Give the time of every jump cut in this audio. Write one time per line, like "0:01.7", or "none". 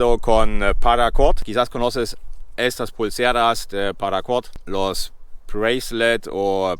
0:01.3
0:04.6

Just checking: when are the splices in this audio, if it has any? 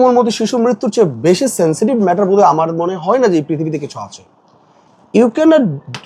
none

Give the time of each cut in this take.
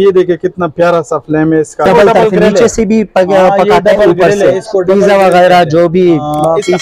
0:01.8

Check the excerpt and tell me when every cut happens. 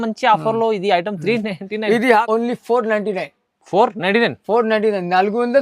0:02.2

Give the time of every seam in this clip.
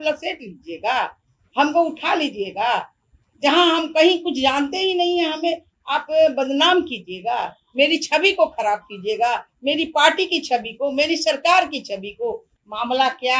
0:12.5

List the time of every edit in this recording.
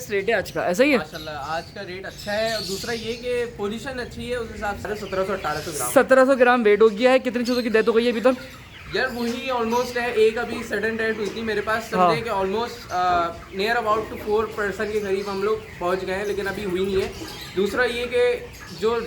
0:04.9

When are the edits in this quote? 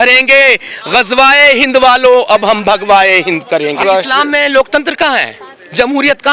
0:03.8

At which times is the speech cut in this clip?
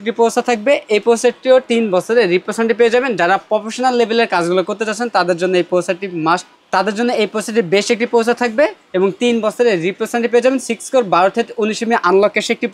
none

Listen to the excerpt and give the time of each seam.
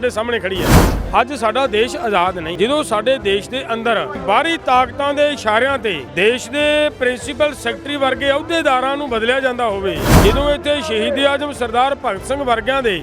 0:00.9
0:02.5
0:04.2
0:06.0
0:10.1

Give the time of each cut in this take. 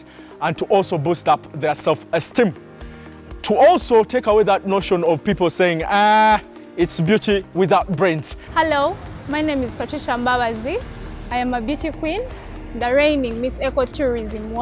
0:08.4

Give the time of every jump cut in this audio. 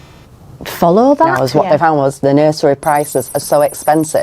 0:01.4

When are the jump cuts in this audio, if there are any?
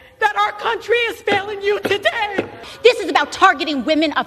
0:02.6

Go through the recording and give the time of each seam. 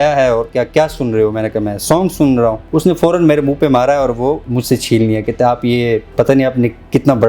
0:02.6
0:04.5
0:06.1

